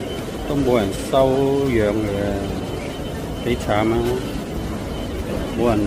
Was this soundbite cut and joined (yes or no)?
no